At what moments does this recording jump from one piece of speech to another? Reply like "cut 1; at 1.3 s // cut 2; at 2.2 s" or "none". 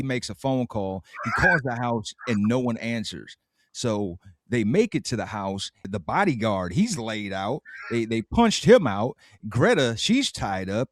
none